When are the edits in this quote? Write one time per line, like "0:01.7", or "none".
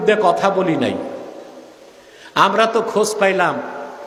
none